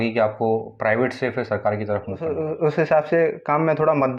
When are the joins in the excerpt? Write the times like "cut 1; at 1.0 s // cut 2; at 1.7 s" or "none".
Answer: cut 1; at 2.3 s